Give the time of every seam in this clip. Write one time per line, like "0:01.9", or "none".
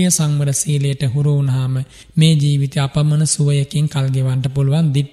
none

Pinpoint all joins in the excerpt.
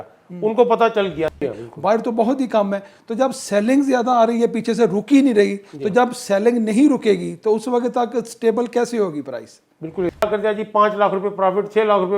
0:01.3
0:10.2

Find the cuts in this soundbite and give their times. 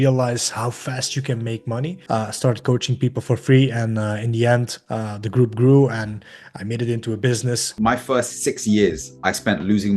0:02.0
0:07.7

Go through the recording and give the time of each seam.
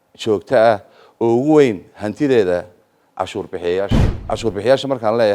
0:04.1

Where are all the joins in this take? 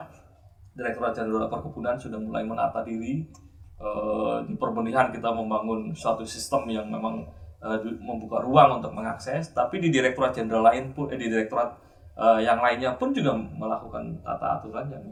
none

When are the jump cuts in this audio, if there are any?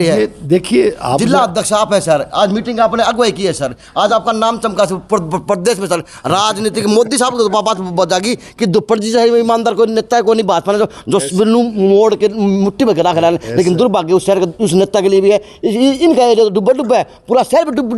none

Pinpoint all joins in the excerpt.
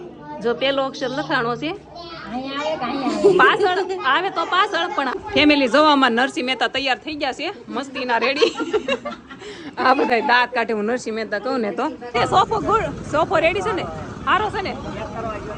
0:05.1
0:12.1

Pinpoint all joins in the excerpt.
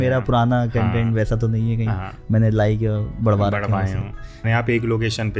0:04.4

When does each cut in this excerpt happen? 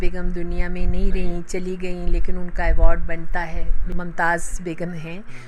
0:03.8

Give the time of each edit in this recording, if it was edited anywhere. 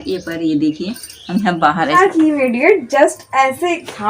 0:02.0

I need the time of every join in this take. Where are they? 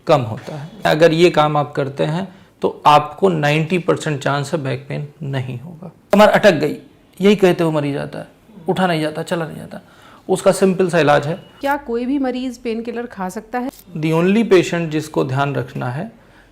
0:00.9
0:06.0
0:11.5
0:13.6

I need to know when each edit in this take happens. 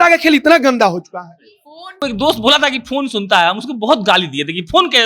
0:02.0

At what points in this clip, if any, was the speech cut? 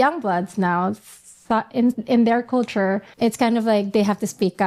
0:03.1

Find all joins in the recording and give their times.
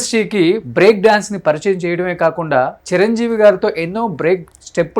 none

